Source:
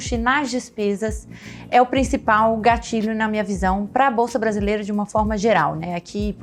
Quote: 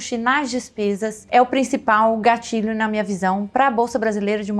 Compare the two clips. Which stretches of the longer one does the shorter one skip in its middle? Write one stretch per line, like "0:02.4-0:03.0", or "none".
0:01.2-0:01.6